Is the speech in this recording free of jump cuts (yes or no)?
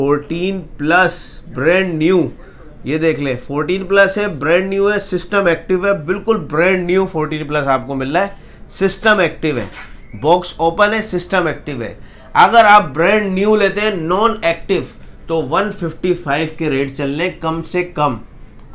yes